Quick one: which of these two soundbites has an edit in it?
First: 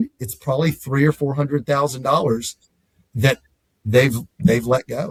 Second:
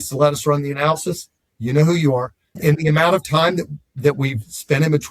second; 1 cut; at 2.6 s

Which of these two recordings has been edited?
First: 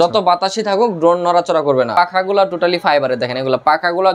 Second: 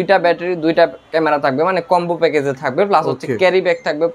first; 1 cut; at 1.9 s

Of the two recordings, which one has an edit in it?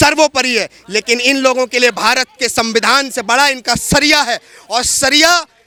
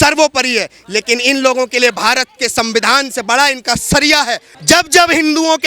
second; 1 cut; at 4.5 s

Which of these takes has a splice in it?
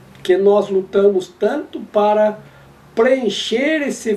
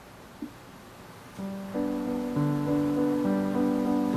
second; 1 cut; at 1.7 s

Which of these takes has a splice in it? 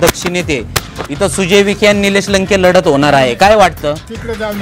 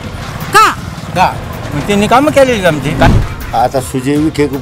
second; 1 cut; at 3.1 s

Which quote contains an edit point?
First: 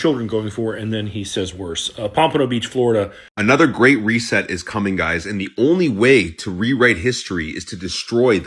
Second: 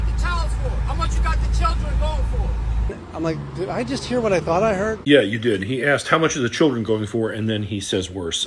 first; 1 cut; at 3.2 s

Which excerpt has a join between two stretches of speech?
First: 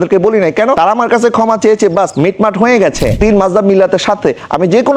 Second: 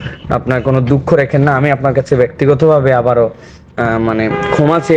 first; 2 cuts; at 2.1 s, 3.2 s

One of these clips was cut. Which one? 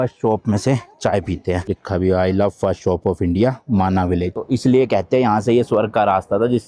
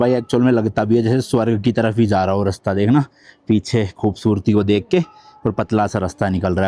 first; 2 cuts; at 1.7 s, 4.4 s

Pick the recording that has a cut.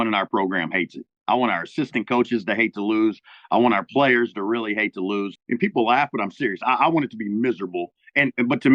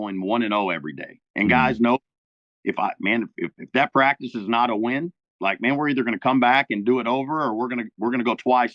first; 1 cut; at 5.4 s

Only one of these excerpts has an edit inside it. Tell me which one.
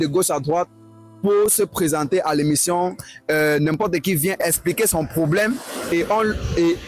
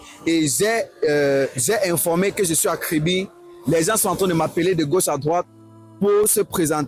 first; 1 cut; at 4.4 s

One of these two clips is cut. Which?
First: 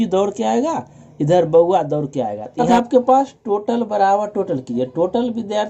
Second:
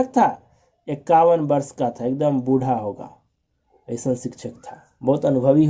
first; 1 cut; at 2.6 s

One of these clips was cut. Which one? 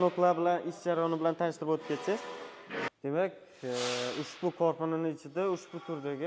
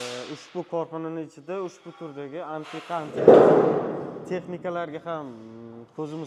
first; 1 cut; at 2.9 s

